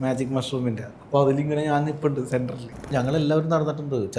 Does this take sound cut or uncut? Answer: cut